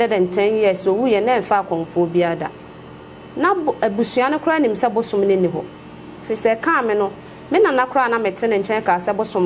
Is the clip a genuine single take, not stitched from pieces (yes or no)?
yes